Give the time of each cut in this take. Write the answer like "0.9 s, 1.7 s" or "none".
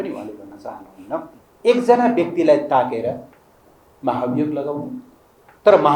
1.4 s